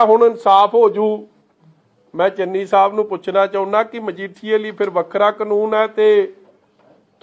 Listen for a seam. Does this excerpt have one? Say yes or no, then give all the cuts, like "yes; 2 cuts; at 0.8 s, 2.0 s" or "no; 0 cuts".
no; 0 cuts